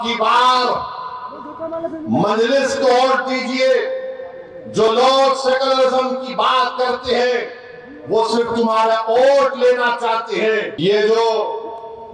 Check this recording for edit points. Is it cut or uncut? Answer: cut